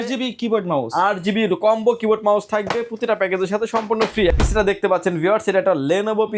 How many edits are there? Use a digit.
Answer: 1